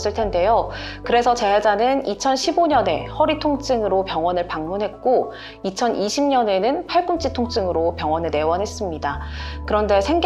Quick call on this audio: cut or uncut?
uncut